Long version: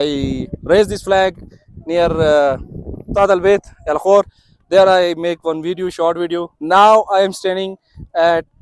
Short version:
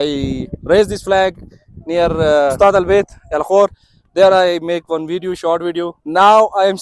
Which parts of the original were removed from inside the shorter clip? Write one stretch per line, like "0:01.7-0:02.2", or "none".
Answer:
0:02.5-0:03.1

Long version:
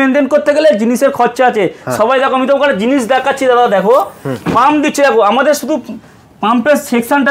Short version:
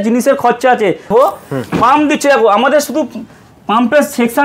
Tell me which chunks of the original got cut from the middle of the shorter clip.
0:01.8-0:03.8

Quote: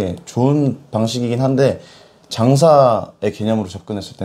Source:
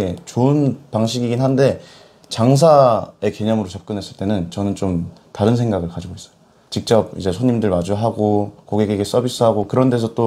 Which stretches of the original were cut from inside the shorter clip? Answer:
none

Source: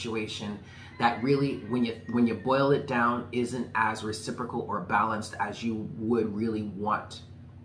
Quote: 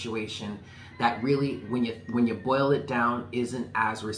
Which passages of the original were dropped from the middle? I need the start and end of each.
none

